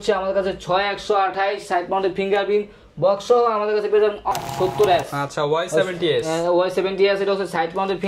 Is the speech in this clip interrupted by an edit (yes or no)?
yes